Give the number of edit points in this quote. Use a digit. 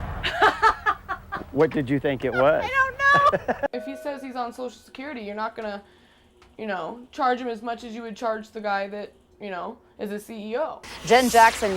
2